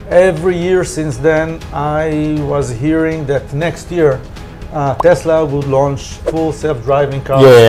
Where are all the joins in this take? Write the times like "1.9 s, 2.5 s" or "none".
none

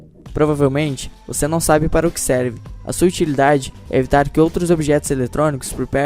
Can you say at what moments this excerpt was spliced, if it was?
4.3 s

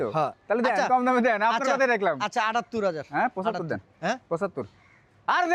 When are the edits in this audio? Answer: none

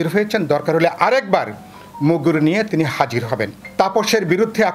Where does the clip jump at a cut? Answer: 3.6 s

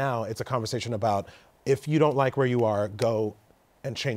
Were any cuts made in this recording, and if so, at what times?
none

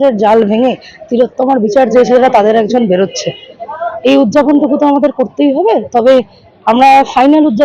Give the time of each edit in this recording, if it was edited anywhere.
none

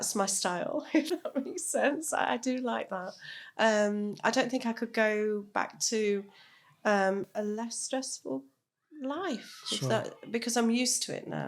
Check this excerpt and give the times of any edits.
none

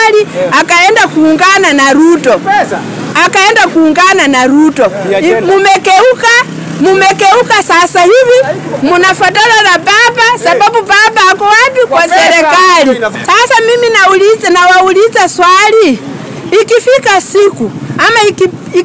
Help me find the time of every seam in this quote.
13.1 s

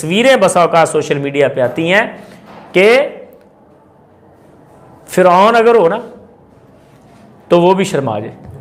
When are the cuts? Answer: none

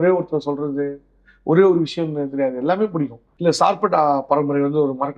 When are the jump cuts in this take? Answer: 3.2 s

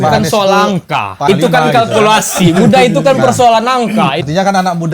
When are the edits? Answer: 1.2 s, 4.2 s

